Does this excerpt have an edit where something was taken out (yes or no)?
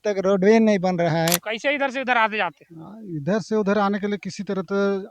yes